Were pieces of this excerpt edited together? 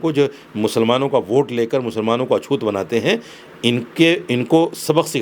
no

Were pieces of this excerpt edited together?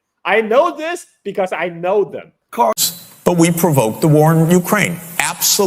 yes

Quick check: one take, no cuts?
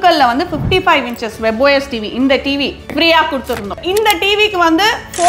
no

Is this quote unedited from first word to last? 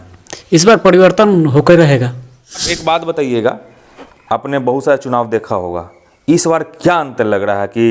no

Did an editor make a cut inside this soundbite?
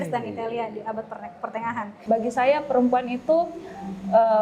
yes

